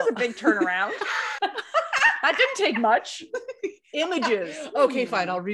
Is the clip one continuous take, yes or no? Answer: yes